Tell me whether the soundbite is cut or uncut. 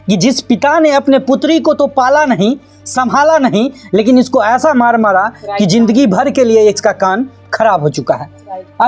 uncut